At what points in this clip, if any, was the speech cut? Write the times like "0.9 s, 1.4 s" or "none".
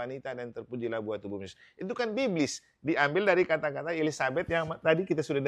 none